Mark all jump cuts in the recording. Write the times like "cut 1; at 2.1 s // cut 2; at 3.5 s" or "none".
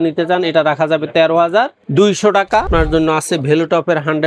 cut 1; at 2.7 s